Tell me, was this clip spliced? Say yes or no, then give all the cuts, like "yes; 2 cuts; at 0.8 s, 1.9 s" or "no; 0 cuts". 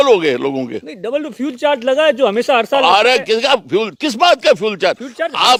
no; 0 cuts